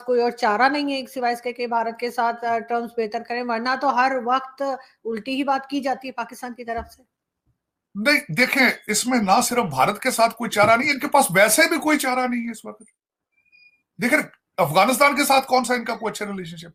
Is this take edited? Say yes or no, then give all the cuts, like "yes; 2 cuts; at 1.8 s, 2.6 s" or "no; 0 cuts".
no; 0 cuts